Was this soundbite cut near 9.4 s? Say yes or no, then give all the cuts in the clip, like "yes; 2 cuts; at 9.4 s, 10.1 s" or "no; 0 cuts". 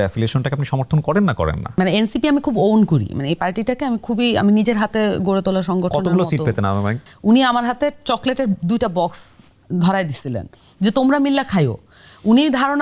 no; 2 cuts; at 1.7 s, 7.0 s